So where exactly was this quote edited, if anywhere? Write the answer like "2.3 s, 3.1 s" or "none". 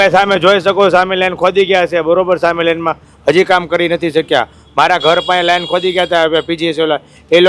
none